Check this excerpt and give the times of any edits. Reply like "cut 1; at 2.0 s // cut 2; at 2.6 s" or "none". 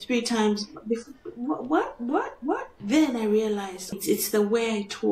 cut 1; at 2.7 s // cut 2; at 4.0 s